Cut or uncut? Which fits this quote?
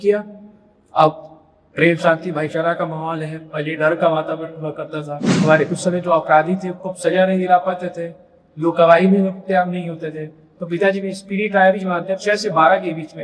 cut